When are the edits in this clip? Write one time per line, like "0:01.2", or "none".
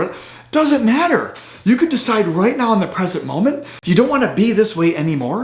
0:03.7